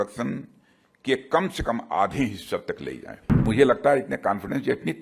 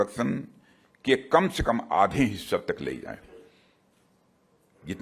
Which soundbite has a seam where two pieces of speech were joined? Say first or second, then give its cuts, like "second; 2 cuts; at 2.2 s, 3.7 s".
first; 1 cut; at 3.4 s